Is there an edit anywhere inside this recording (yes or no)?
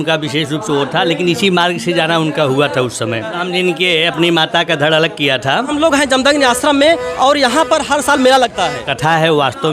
yes